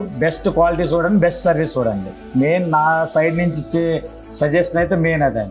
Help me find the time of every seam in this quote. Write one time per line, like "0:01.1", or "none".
0:02.1